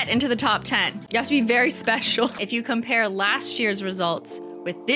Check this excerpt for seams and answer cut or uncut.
uncut